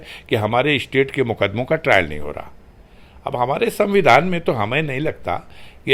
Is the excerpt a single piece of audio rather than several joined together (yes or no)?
yes